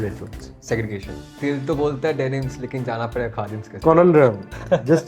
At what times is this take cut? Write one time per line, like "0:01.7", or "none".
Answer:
0:01.2
0:03.6